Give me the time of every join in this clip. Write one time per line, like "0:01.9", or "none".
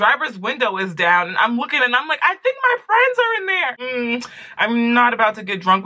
0:03.8